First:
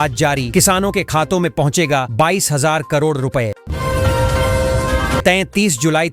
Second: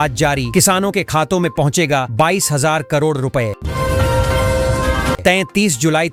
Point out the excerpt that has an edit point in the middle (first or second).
first